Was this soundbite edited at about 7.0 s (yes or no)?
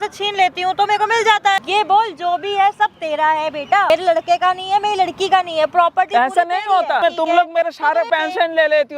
yes